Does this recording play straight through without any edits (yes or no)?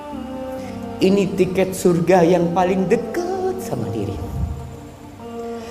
no